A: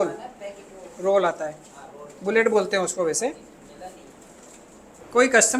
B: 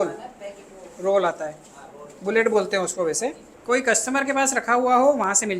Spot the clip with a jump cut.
B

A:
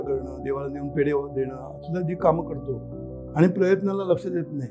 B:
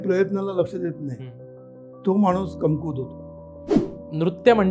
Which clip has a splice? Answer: B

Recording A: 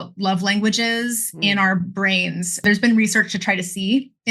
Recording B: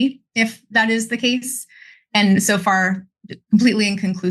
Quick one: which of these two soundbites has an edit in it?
A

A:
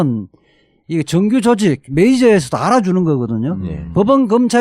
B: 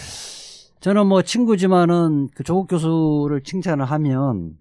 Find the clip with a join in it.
A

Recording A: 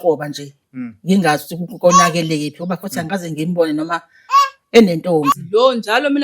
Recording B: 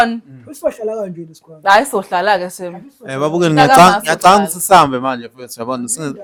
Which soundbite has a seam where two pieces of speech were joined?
A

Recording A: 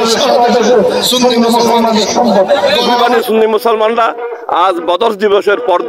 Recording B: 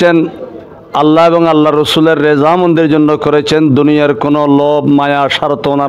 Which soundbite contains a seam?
A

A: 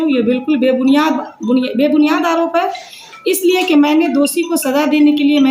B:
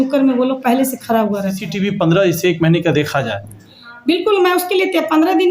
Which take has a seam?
B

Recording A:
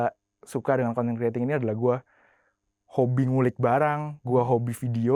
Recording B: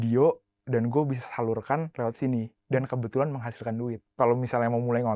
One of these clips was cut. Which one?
B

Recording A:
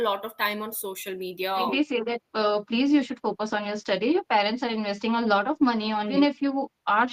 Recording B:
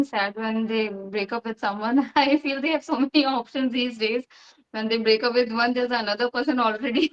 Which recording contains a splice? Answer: A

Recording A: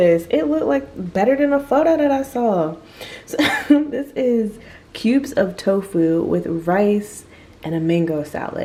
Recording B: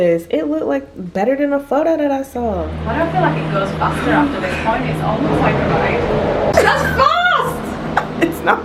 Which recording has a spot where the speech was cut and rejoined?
B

